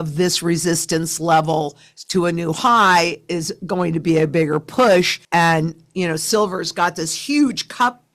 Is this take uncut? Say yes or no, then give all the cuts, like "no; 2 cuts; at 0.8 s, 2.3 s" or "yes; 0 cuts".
yes; 0 cuts